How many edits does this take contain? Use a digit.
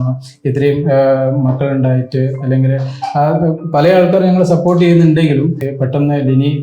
1